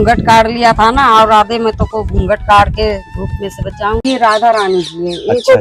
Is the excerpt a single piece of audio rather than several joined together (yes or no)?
yes